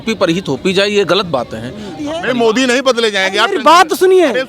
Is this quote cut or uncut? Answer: cut